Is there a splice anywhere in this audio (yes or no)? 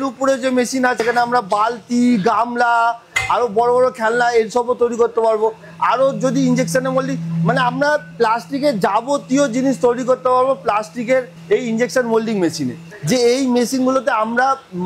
yes